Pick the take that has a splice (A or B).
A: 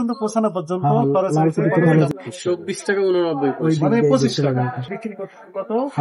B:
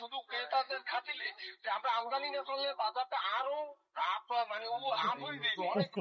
A